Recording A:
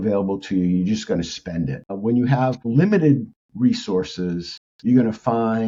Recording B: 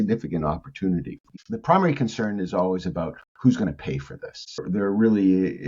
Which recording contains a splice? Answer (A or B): B